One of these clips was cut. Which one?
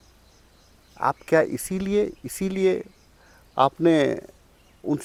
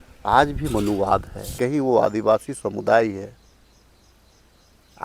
second; 1 cut; at 1.4 s

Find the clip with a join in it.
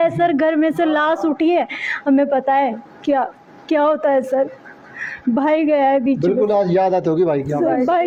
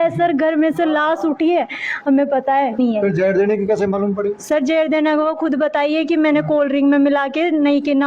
second; 1 cut; at 2.8 s

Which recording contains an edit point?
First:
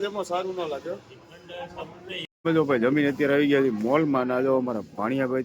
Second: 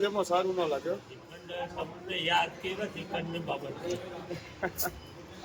first; 1 cut; at 2.3 s

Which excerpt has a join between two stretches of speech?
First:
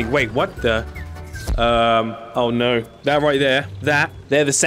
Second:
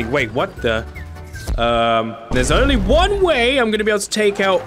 second; 1 cut; at 2.2 s

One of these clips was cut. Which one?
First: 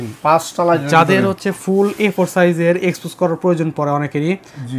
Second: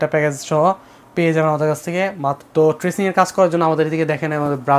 second; 1 cut; at 2.4 s

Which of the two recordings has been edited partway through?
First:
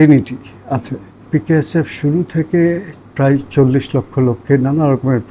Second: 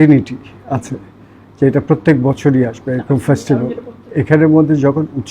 first; 1 cut; at 1.2 s

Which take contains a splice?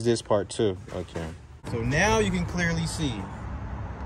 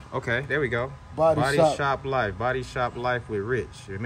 first; 1 cut; at 1.7 s

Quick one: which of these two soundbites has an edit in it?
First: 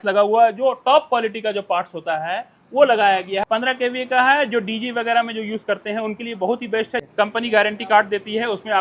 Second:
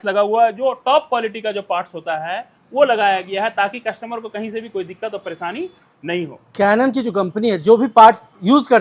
first; 2 cuts; at 3.4 s, 7.1 s

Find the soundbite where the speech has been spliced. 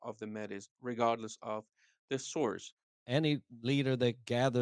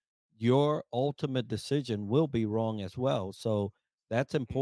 first; 1 cut; at 3.0 s

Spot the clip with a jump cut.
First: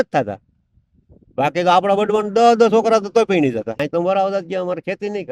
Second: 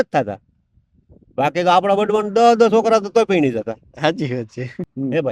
first; 1 cut; at 3.8 s

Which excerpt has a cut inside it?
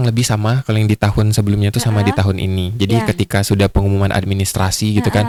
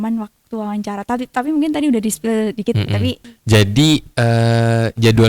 second; 1 cut; at 3.2 s

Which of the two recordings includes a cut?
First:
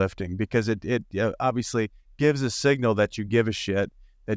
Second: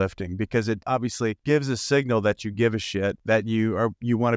second; 2 cuts; at 1.0 s, 3.2 s

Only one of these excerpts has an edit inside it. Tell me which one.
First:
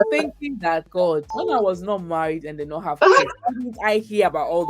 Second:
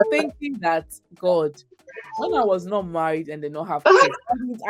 first; 1 cut; at 1.0 s

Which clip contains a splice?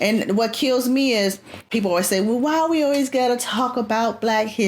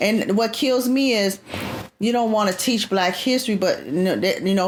first; 1 cut; at 1.7 s

